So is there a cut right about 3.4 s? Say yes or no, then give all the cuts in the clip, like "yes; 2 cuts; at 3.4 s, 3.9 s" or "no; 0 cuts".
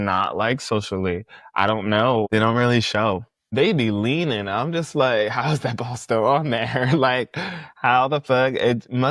yes; 2 cuts; at 2.3 s, 3.4 s